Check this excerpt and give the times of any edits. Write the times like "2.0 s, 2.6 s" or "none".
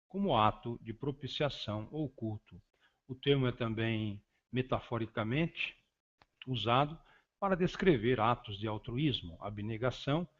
9.3 s